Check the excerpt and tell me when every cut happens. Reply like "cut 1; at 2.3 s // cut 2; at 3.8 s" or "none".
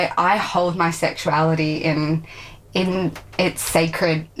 none